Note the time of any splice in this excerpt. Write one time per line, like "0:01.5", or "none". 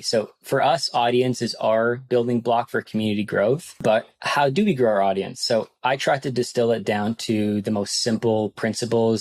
0:03.7

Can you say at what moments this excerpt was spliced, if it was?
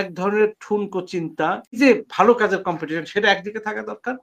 0:01.8

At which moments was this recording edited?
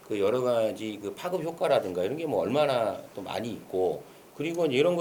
none

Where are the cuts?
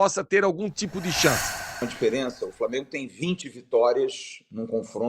0:01.7

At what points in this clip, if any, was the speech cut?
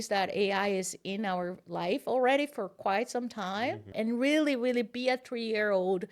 0:03.9

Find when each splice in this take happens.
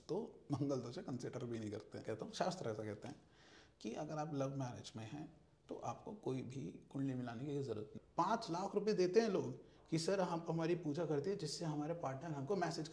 0:02.0
0:07.9

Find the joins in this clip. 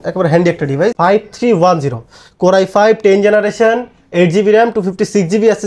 0:00.9

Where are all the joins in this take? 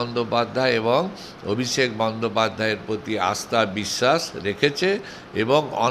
none

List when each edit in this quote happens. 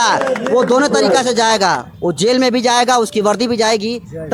none

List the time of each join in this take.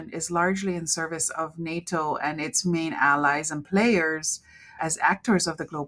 none

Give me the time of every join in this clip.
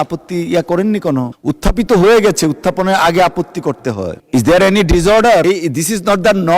0:01.3
0:04.2
0:05.4

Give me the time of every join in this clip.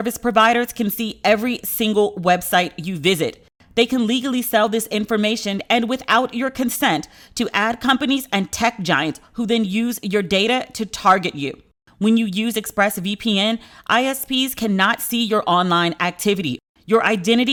none

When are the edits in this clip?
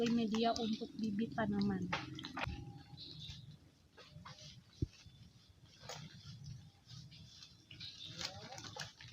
0:02.4

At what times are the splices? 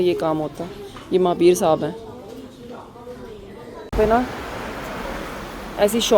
0:03.9

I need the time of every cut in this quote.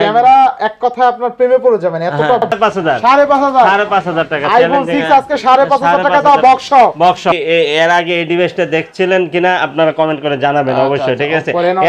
0:02.5
0:07.2

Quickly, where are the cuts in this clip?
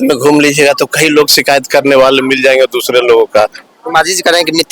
0:03.7

